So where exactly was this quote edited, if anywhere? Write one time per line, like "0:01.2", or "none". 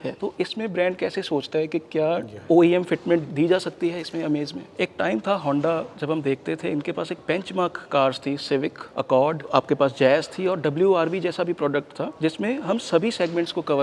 0:04.7
0:09.4